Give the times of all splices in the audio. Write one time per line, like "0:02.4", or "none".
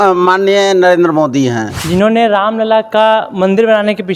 0:01.8